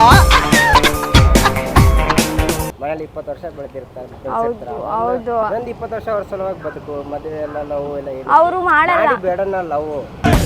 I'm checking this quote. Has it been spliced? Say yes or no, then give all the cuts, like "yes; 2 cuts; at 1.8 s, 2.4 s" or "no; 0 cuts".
yes; 1 cut; at 2.7 s